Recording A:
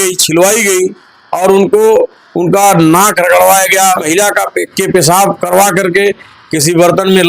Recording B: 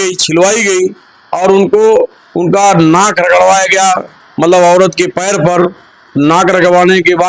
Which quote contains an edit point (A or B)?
A